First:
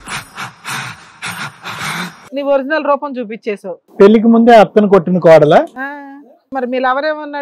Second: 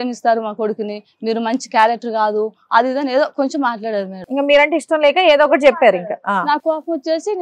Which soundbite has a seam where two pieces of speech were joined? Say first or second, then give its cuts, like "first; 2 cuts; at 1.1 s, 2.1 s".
first; 3 cuts; at 2.3 s, 3.8 s, 6.5 s